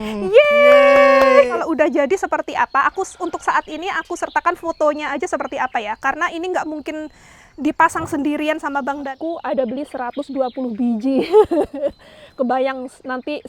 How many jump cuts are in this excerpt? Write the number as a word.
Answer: two